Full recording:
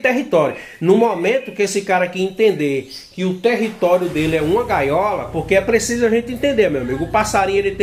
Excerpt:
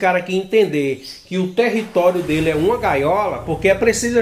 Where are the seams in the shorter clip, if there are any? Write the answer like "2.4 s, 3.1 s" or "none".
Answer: none

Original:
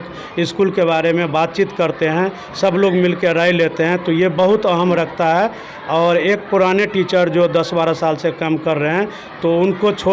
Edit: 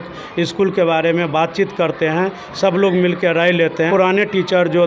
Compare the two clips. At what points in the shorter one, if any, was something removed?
3.9 s

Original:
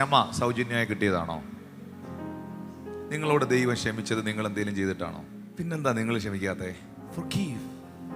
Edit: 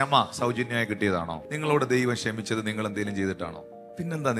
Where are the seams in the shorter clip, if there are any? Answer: 1.5 s

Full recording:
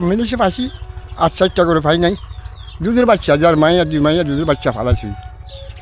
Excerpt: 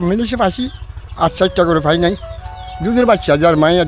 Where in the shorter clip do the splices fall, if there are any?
none

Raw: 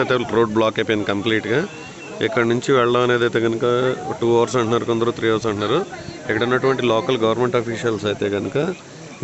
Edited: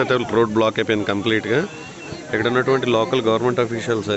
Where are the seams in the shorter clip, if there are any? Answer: 2.0 s

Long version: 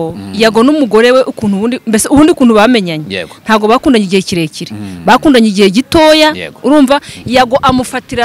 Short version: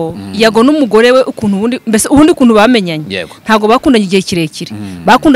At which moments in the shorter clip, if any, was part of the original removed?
none

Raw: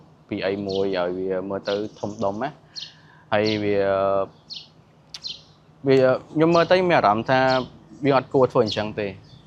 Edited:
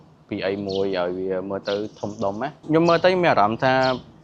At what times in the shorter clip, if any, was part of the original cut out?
2.6 s

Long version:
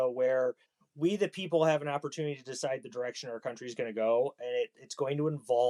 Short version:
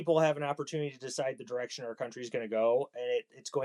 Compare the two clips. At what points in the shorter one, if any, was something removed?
none

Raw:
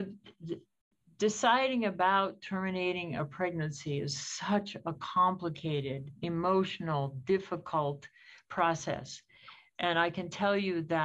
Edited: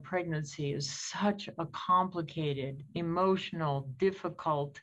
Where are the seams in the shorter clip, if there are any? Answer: none

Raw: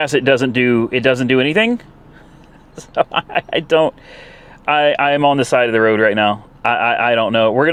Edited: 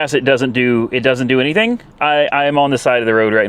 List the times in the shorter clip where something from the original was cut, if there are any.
1.9 s

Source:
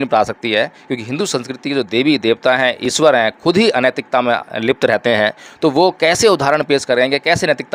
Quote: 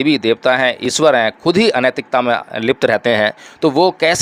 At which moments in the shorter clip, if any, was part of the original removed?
none

